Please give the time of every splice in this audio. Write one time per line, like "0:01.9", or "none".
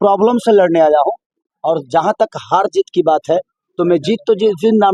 none